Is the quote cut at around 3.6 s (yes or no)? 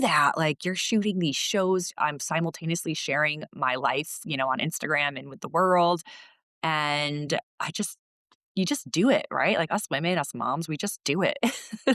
no